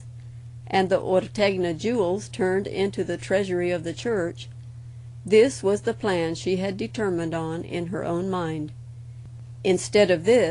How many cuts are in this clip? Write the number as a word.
one